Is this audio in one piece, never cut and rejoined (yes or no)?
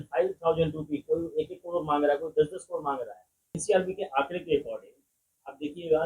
no